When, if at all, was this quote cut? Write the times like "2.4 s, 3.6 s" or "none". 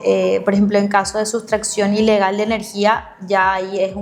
none